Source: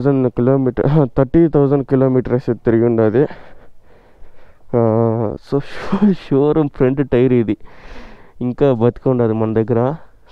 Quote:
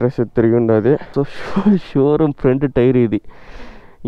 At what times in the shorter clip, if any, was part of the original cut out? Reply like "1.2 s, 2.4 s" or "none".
1.1 s